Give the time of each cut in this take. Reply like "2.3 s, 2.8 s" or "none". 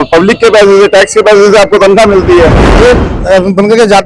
2.6 s